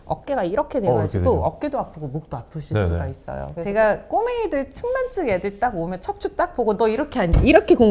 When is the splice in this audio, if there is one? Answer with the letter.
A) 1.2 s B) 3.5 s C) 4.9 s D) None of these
B